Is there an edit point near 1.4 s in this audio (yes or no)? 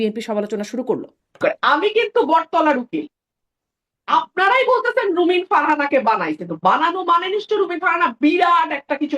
yes